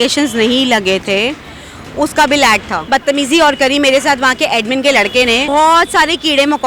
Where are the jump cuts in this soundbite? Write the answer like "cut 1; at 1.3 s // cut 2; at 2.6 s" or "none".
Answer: cut 1; at 2.8 s // cut 2; at 5.5 s